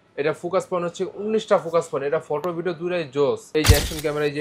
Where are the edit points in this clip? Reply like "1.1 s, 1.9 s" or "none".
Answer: 3.5 s